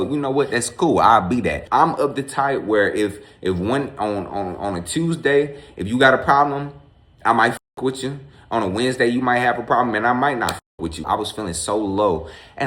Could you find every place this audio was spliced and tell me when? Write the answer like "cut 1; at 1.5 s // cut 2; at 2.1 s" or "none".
cut 1; at 1.6 s // cut 2; at 11.0 s

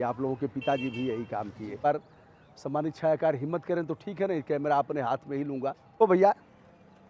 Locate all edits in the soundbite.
cut 1; at 1.8 s // cut 2; at 6.0 s

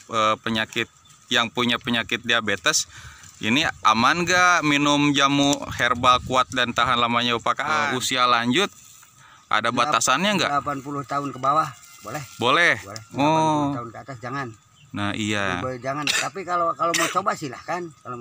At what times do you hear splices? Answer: cut 1; at 7.8 s

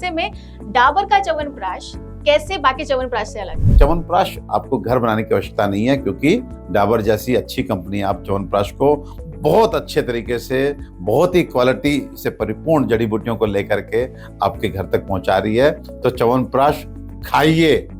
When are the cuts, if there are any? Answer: cut 1; at 3.7 s

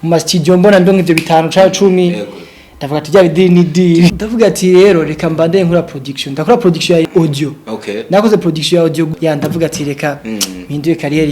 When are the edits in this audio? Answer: cut 1; at 4.1 s // cut 2; at 7.0 s // cut 3; at 9.1 s

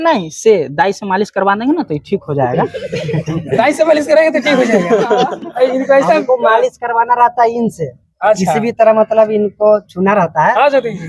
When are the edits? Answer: none

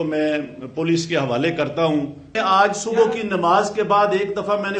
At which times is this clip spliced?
cut 1; at 2.4 s

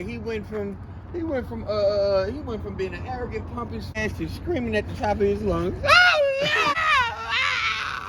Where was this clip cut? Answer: cut 1; at 3.9 s // cut 2; at 6.7 s

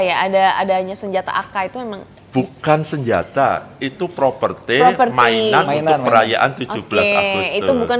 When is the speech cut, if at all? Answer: none

